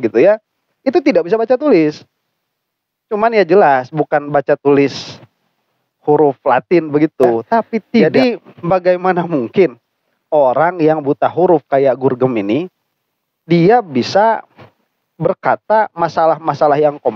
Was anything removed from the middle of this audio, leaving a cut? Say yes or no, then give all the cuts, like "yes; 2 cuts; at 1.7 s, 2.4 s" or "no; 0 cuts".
yes; 1 cut; at 8.0 s